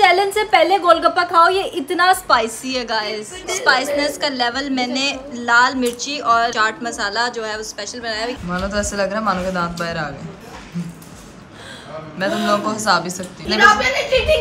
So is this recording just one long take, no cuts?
no; 5 cuts; at 3.4 s, 6.5 s, 8.4 s, 10.4 s, 13.4 s

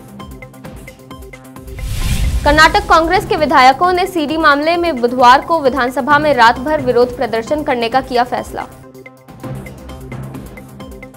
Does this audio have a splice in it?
yes; 2 cuts; at 1.6 s, 9.7 s

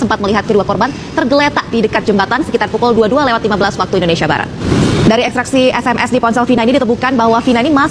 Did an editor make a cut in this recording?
yes; 1 cut; at 4.6 s

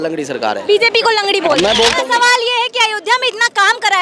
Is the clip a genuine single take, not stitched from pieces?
no; 1 cut; at 2.0 s

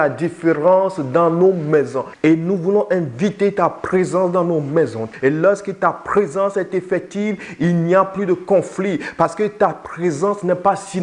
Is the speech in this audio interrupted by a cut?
yes; 2 cuts; at 2.1 s, 5.1 s

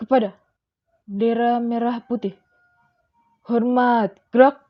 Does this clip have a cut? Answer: no; 0 cuts

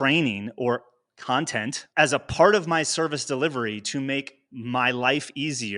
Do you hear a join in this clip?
yes; 1 cut; at 1.9 s

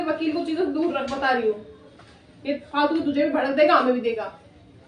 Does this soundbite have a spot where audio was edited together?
no; 0 cuts

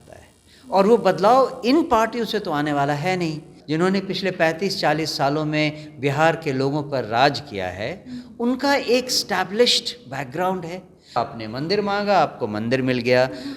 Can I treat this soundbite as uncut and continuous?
no; 2 cuts; at 3.5 s, 11.2 s

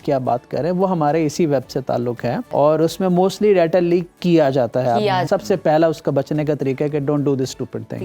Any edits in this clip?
yes; 2 cuts; at 2.4 s, 5.2 s

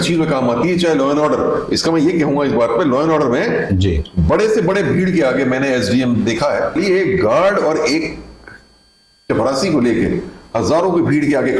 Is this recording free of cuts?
yes; 0 cuts

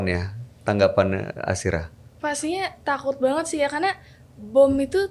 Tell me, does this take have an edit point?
no; 0 cuts

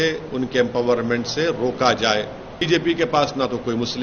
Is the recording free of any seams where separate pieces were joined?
no; 1 cut; at 2.7 s

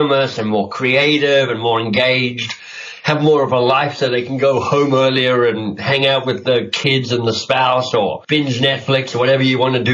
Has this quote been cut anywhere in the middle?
yes; 1 cut; at 8.2 s

